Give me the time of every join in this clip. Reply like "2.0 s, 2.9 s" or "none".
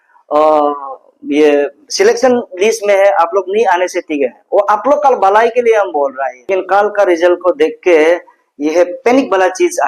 6.3 s